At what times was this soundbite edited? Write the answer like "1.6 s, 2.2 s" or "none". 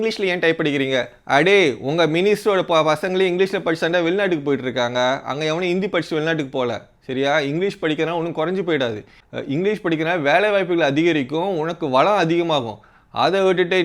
none